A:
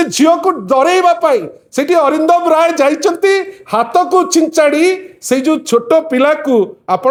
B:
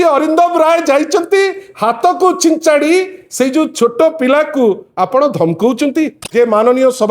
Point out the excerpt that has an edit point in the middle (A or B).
B